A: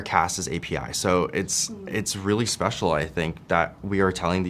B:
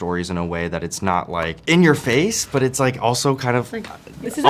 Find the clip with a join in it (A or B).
B